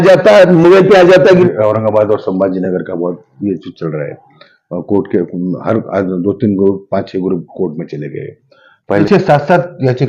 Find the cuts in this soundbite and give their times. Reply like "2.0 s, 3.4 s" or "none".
1.4 s, 9.1 s